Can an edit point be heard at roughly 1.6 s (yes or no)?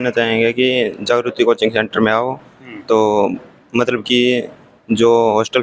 no